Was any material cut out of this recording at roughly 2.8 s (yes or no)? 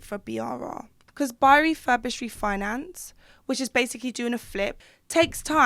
no